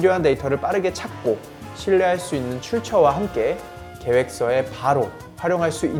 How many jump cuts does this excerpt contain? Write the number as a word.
zero